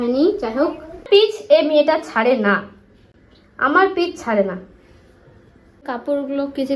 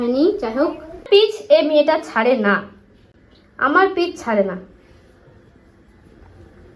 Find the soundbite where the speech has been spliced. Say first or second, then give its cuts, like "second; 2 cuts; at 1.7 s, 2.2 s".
first; 1 cut; at 5.8 s